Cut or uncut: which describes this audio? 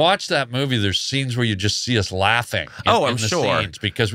uncut